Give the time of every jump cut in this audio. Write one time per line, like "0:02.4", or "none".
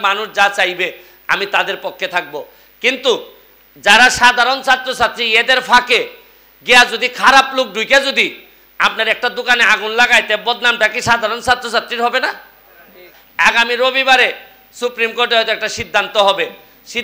none